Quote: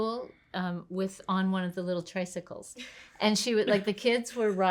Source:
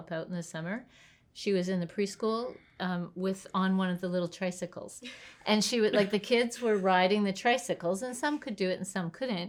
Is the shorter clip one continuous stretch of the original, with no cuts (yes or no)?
yes